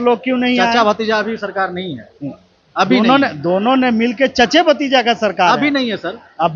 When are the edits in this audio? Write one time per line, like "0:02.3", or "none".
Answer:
none